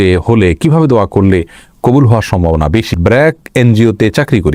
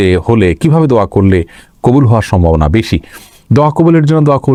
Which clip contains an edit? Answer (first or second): first